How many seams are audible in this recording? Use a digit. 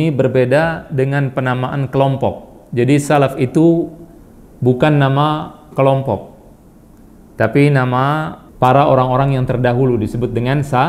1